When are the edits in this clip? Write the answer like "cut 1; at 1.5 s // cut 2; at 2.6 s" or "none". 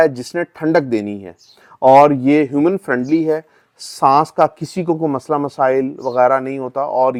none